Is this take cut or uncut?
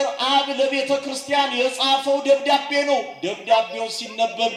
uncut